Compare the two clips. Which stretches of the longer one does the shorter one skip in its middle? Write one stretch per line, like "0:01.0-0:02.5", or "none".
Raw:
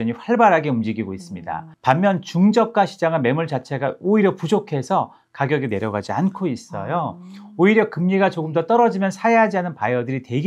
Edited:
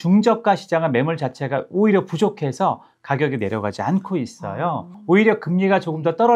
0:07.2-0:07.4